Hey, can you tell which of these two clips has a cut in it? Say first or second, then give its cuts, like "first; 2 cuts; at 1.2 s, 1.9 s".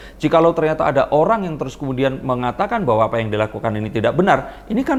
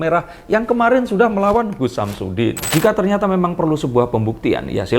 second; 1 cut; at 2.7 s